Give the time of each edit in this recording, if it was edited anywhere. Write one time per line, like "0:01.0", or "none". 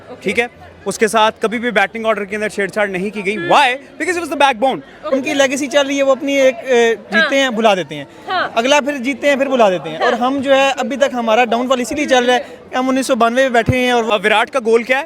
0:05.1
0:14.1